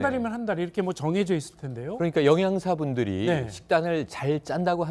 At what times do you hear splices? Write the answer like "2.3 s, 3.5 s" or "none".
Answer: none